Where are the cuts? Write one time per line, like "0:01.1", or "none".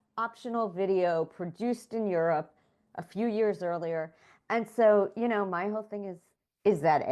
none